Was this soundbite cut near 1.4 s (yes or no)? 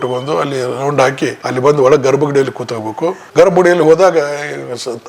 yes